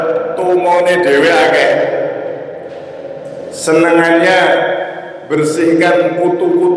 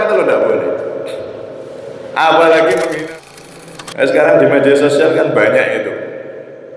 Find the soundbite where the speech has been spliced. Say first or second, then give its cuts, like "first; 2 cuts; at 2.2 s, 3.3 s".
second; 1 cut; at 3.0 s